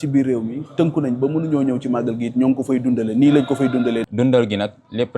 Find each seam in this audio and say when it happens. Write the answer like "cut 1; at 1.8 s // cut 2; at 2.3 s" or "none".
cut 1; at 4.1 s